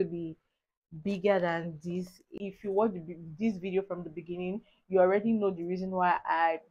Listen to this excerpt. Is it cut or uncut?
cut